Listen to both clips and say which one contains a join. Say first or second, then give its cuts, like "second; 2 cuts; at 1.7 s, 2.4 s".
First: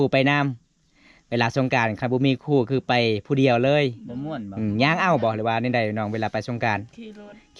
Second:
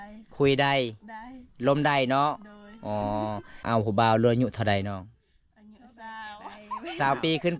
second; 1 cut; at 3.6 s